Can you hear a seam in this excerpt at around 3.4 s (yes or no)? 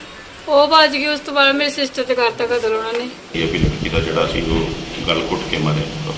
yes